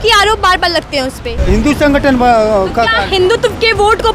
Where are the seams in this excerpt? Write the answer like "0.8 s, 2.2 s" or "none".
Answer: 1.3 s